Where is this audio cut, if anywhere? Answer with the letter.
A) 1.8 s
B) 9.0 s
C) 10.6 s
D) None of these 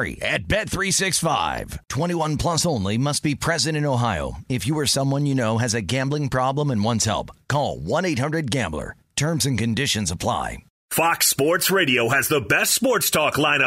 C